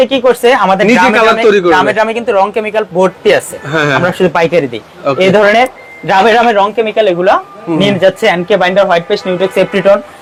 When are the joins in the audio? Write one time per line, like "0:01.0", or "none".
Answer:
none